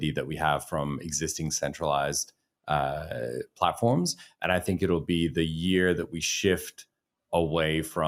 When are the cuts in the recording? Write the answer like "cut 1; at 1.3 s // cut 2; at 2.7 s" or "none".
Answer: none

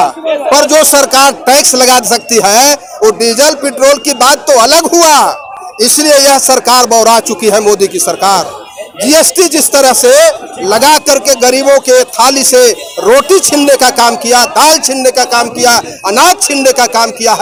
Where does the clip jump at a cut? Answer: none

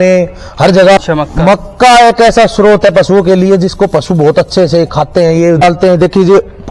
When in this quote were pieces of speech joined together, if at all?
cut 1; at 1.0 s // cut 2; at 5.6 s

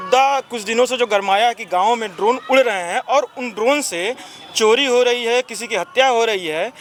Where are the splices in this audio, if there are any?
none

